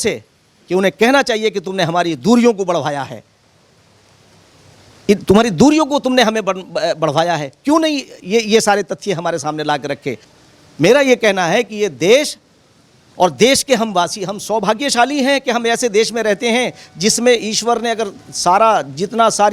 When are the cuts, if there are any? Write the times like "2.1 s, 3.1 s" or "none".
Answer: none